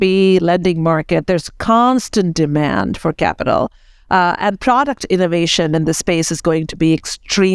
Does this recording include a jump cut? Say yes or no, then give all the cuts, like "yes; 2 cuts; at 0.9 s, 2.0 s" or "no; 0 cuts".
no; 0 cuts